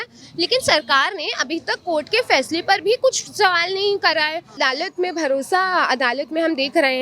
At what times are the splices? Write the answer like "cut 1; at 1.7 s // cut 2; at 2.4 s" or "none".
cut 1; at 4.5 s